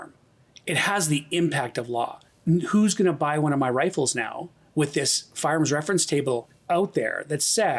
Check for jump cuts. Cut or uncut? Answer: cut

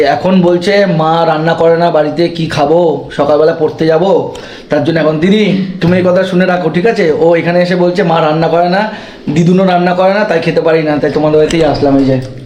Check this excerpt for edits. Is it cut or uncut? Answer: uncut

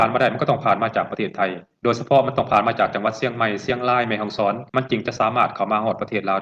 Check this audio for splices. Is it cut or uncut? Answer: uncut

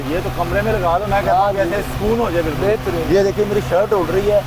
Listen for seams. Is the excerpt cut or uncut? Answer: uncut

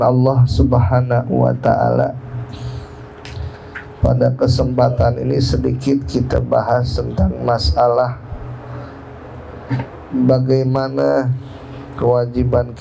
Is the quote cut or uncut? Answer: uncut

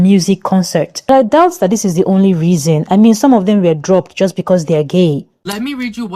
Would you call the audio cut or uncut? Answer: cut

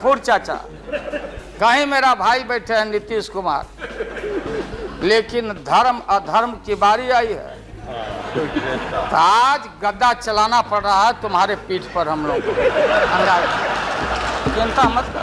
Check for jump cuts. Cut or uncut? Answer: uncut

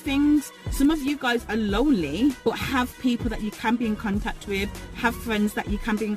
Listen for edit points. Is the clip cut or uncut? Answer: cut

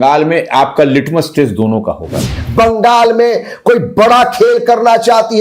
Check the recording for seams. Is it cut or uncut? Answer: cut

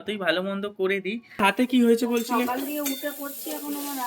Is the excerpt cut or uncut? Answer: cut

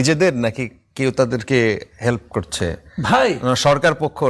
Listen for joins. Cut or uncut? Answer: uncut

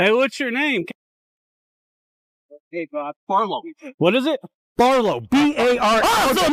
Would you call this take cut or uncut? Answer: uncut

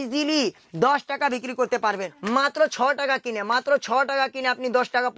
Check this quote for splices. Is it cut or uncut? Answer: cut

